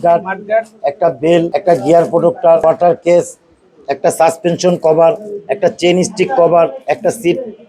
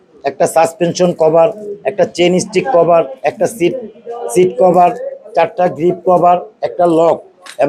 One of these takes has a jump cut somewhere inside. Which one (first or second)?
first